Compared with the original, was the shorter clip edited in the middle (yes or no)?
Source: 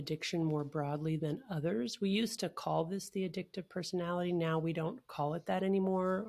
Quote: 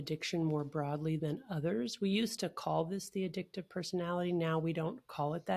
no